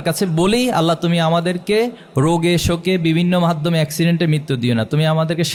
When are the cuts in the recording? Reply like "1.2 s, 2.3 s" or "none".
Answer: none